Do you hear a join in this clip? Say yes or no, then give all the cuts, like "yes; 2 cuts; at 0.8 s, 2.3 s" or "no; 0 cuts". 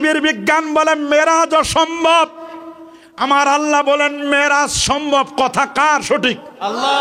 no; 0 cuts